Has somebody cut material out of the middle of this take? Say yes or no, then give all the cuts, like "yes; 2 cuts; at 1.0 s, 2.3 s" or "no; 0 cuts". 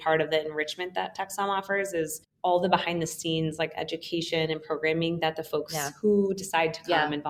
no; 0 cuts